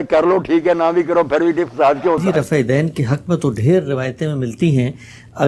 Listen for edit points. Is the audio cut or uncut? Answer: cut